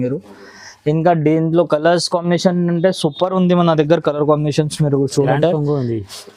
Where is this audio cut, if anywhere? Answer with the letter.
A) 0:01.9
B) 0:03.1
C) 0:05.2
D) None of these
C